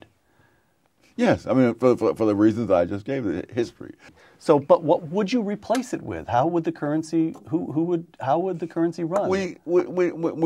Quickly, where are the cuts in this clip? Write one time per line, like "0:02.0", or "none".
0:04.1